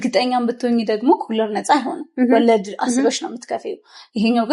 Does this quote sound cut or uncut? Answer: uncut